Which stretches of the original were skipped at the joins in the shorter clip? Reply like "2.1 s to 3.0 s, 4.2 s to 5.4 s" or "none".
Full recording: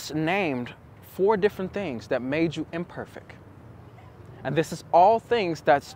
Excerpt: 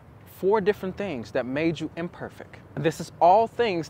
3.4 s to 4.4 s